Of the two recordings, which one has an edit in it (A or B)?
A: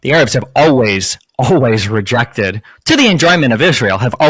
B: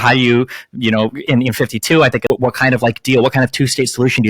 B